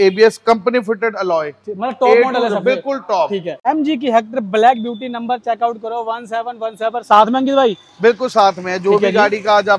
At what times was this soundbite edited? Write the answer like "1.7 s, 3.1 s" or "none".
3.5 s